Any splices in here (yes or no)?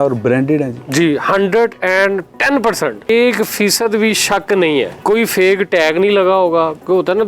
yes